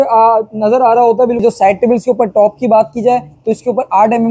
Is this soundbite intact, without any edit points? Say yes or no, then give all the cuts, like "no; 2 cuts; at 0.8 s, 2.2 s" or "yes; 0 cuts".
no; 1 cut; at 1.4 s